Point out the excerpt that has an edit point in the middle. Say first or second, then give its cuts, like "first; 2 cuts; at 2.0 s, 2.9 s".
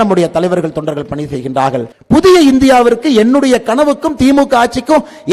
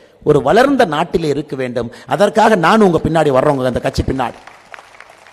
first; 1 cut; at 1.9 s